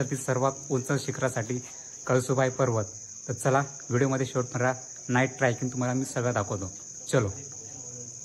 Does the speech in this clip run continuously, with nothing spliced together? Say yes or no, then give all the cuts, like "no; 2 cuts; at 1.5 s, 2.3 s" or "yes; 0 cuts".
yes; 0 cuts